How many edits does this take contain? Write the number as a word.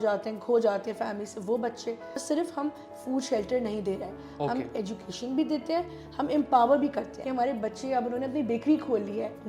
two